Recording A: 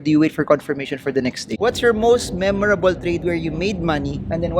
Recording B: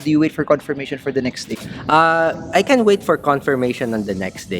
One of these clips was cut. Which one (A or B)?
A